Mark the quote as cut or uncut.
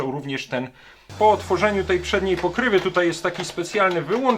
cut